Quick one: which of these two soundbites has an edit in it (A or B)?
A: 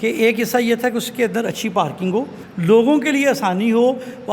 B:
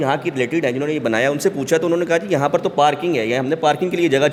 A